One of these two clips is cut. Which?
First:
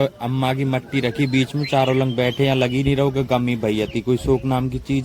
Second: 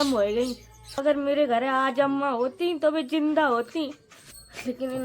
second; 1 cut; at 1.0 s

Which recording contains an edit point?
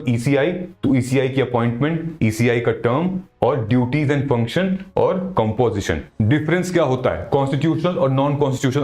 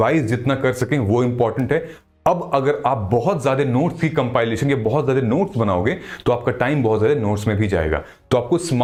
first; 1 cut; at 6.1 s

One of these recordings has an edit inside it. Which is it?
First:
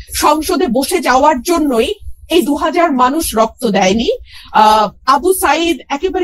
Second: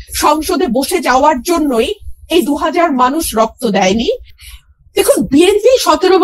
second; 1 cut; at 4.3 s

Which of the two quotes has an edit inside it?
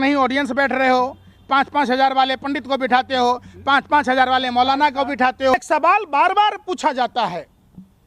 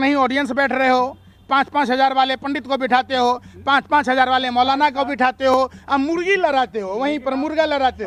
first; 1 cut; at 5.5 s

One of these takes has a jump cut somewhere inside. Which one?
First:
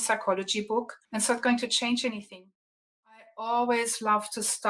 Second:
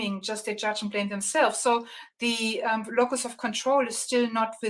first; 2 cuts; at 1.0 s, 3.3 s

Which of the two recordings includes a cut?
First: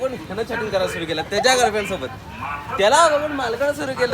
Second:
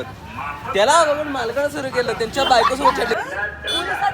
second; 1 cut; at 3.1 s

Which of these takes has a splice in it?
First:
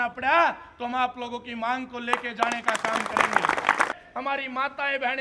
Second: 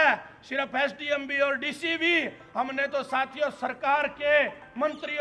first; 1 cut; at 3.9 s

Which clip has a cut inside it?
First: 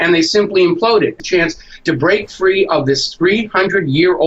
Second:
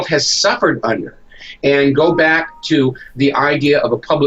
first; 1 cut; at 1.2 s

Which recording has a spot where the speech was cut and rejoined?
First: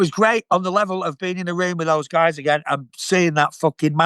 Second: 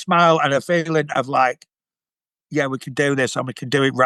first; 1 cut; at 2.9 s

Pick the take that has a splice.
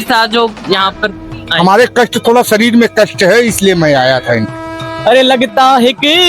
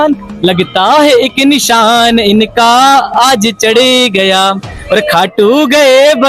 first; 1 cut; at 4.9 s

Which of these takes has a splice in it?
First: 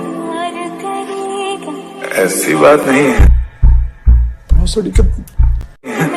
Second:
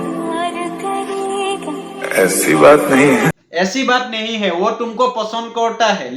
second; 1 cut; at 2.8 s

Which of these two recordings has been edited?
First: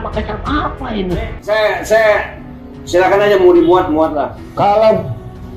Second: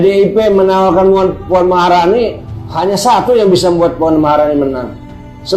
first; 2 cuts; at 1.3 s, 4.4 s

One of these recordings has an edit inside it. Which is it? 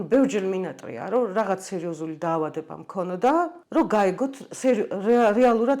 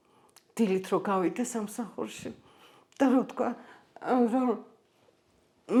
first; 1 cut; at 3.6 s

